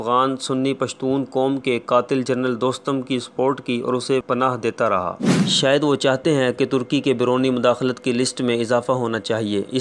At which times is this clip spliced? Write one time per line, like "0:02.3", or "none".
0:05.3